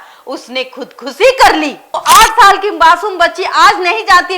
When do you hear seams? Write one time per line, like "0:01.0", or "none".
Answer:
0:02.0

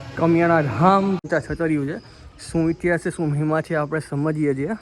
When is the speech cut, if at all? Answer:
0:01.2

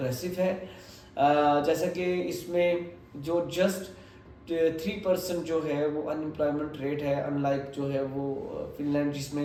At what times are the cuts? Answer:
none

